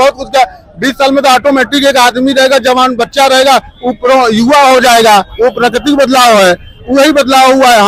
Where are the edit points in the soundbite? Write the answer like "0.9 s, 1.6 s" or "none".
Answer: none